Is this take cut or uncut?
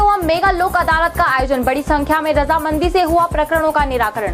uncut